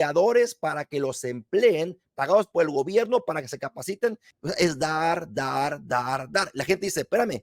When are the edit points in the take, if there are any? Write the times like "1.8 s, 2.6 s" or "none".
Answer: 4.3 s